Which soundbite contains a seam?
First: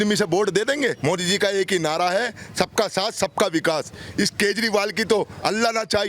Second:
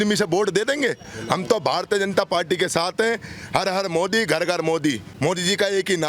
first; 1 cut; at 1.0 s

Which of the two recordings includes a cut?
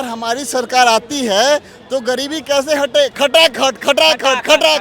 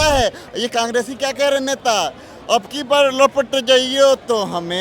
first; 1 cut; at 3.1 s

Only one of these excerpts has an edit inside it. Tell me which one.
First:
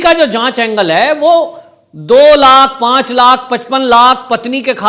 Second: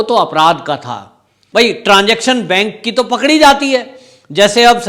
second; 1 cut; at 1.4 s

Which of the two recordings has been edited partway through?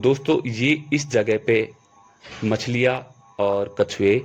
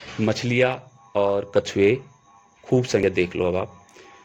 second; 1 cut; at 3.0 s

